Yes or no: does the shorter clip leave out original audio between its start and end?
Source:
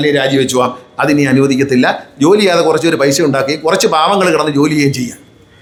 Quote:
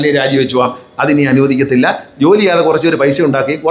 no